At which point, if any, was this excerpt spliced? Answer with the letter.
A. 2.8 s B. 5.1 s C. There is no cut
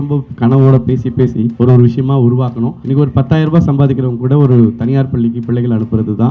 A